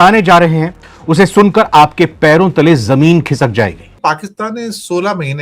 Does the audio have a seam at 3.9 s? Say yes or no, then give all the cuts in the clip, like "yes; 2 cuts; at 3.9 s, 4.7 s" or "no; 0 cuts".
yes; 1 cut; at 3.9 s